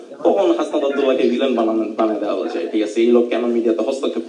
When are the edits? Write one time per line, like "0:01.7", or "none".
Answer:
none